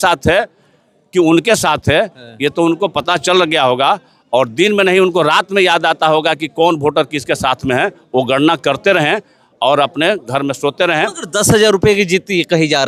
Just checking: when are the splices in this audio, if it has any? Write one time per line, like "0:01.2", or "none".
none